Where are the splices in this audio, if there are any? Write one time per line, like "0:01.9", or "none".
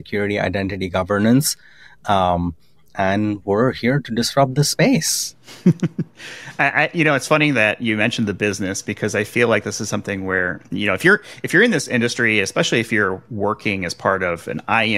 none